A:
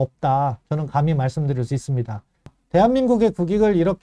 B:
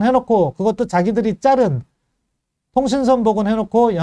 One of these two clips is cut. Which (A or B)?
A